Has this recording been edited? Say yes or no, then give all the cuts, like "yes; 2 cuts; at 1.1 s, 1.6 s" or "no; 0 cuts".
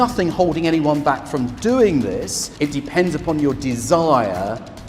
yes; 1 cut; at 2.4 s